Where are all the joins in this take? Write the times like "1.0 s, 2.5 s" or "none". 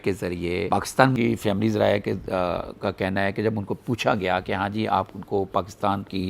1.2 s

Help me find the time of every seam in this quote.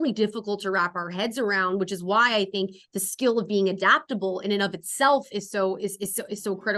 none

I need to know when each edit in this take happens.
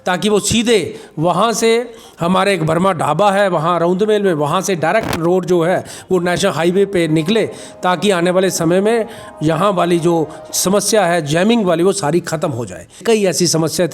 13.0 s

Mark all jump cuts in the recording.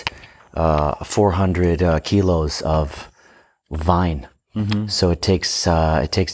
none

